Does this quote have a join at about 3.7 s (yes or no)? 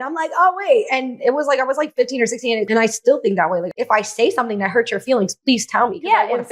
yes